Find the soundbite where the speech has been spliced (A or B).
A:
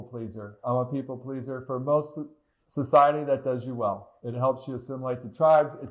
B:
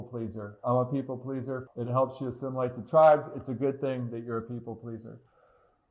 B